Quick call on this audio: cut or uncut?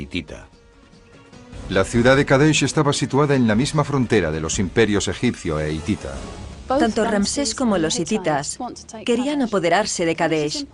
uncut